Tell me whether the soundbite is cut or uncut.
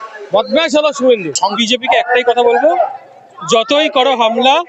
cut